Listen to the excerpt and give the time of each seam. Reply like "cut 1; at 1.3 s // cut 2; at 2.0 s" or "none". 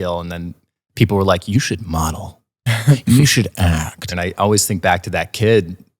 cut 1; at 4.1 s